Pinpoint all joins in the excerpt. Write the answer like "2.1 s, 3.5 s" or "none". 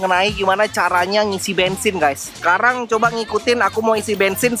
2.4 s